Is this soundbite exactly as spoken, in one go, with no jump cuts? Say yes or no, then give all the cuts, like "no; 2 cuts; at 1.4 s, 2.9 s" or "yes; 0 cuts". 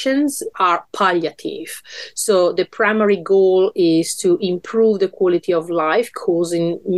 yes; 0 cuts